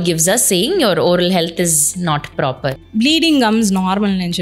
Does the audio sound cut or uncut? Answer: cut